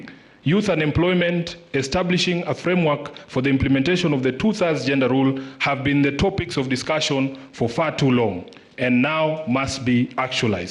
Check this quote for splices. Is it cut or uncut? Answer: uncut